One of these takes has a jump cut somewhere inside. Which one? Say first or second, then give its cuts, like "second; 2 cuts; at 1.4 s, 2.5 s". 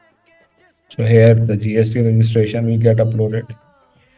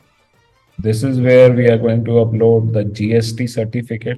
first; 1 cut; at 0.9 s